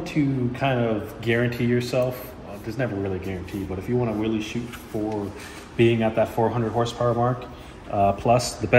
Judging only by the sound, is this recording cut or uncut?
uncut